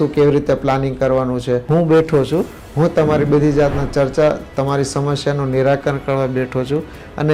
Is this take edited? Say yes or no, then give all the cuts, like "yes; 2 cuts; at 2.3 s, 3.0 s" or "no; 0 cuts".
yes; 1 cut; at 1.7 s